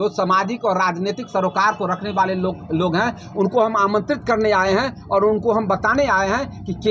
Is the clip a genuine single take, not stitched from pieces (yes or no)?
yes